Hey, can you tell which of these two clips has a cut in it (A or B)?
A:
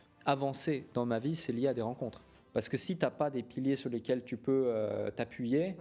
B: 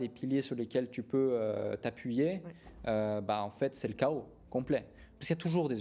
A